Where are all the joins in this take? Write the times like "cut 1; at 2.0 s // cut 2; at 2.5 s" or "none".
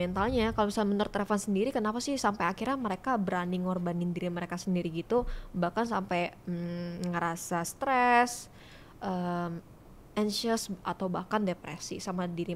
none